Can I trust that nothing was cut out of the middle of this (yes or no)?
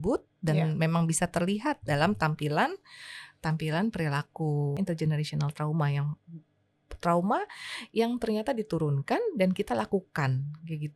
no